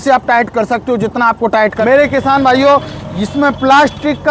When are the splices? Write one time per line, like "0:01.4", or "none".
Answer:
0:01.8